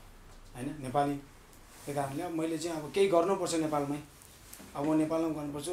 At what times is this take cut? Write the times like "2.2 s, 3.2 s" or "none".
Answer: none